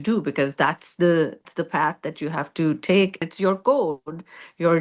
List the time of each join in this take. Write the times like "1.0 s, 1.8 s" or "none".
1.5 s, 3.2 s